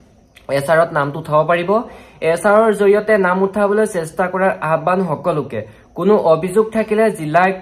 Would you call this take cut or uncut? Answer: uncut